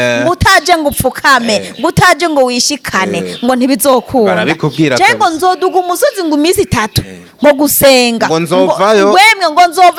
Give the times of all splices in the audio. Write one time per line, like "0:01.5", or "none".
none